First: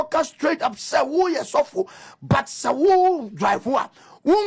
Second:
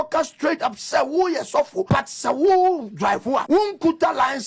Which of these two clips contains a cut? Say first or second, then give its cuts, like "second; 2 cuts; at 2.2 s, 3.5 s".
second; 2 cuts; at 1.9 s, 3.4 s